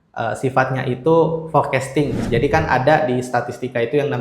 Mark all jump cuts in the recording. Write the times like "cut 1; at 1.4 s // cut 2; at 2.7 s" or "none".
cut 1; at 2.2 s